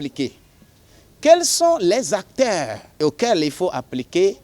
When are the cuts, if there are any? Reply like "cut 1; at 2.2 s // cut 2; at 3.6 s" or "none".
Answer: cut 1; at 3.0 s